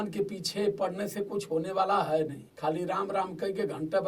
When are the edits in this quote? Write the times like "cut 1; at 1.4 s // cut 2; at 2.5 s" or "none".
cut 1; at 2.4 s